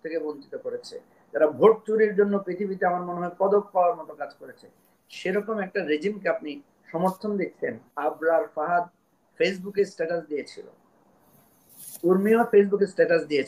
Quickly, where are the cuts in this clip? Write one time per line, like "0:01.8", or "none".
0:07.9

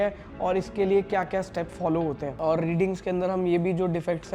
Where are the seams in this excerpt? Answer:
0:02.3

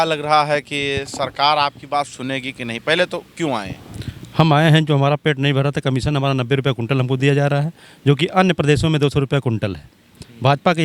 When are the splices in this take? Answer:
none

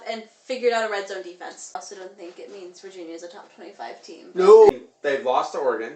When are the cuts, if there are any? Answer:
0:01.8
0:04.7

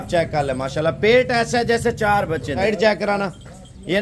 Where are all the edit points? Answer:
0:02.6

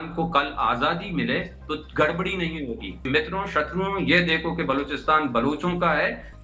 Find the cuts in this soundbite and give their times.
0:03.1

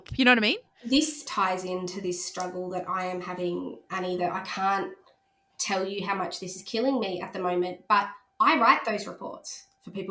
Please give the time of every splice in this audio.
0:01.2

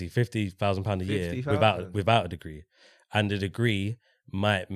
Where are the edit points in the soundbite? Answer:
none

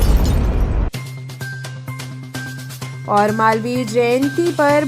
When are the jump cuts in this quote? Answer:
none

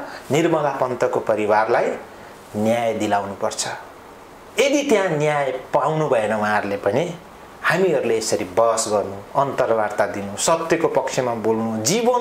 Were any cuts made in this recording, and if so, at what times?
none

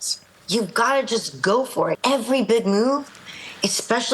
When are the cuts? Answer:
0:02.0

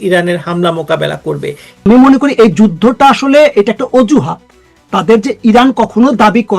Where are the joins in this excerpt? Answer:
0:01.8

